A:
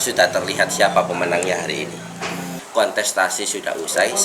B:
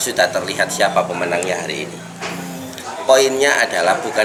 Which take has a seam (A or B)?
A